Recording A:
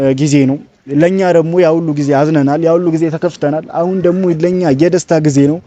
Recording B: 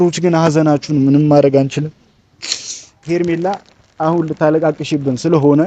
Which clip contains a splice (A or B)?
B